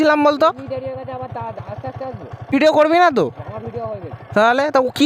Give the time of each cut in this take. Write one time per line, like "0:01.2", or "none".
0:02.5